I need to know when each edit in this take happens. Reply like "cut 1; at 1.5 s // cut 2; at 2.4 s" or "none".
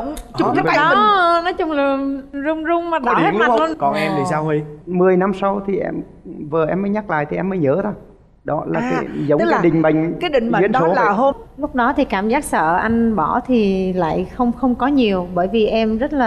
cut 1; at 11.4 s